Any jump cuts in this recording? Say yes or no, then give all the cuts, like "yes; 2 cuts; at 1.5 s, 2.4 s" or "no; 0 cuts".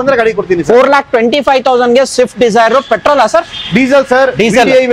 no; 0 cuts